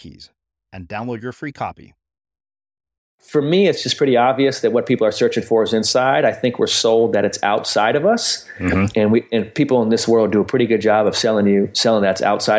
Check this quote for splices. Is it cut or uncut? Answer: cut